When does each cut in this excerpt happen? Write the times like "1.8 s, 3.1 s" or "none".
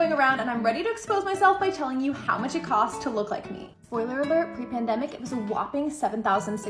none